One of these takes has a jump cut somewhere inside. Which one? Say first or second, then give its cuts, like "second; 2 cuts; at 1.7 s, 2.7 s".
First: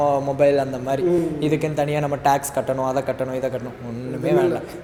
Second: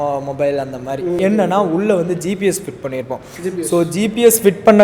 second; 1 cut; at 1.2 s